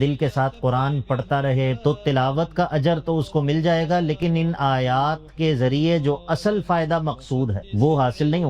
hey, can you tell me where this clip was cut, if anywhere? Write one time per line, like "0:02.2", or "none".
0:01.8
0:07.6